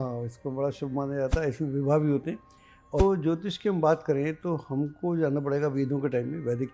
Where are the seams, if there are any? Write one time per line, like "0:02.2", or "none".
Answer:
0:03.0

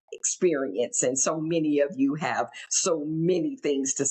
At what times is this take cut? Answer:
none

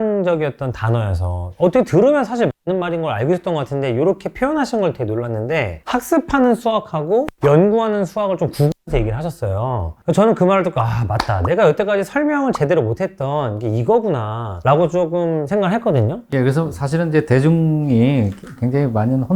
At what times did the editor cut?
none

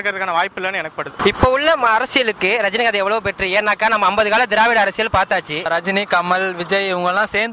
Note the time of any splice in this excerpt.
0:01.2
0:05.7

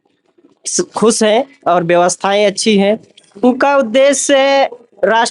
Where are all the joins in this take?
0:03.4

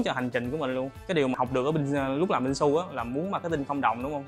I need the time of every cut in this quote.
0:00.9

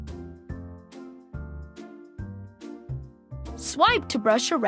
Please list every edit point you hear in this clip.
0:03.7

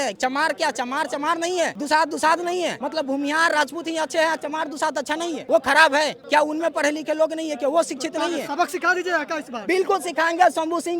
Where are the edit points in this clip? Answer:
0:01.8
0:02.8
0:05.4
0:06.2

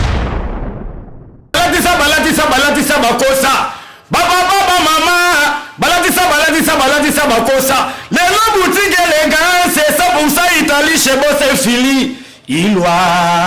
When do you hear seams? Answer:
0:01.5

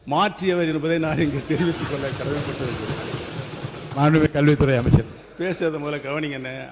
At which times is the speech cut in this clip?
none

